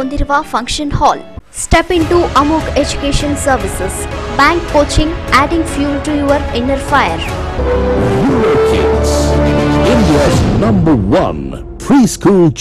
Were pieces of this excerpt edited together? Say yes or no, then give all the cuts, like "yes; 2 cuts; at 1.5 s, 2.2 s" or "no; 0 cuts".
yes; 1 cut; at 1.2 s